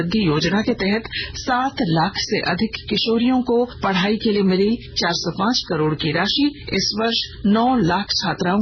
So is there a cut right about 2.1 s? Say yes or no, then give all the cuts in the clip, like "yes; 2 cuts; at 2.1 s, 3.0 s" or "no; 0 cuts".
no; 3 cuts; at 3.8 s, 4.9 s, 7.1 s